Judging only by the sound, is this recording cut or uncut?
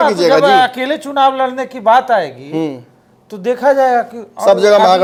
uncut